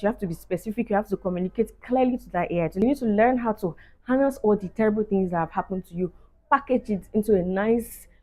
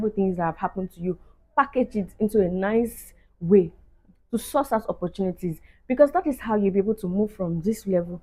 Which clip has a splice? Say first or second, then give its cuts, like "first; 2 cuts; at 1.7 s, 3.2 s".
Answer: first; 1 cut; at 2.7 s